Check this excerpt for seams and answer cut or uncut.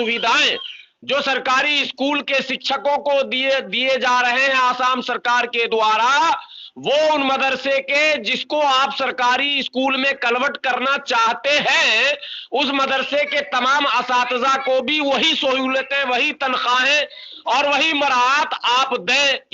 uncut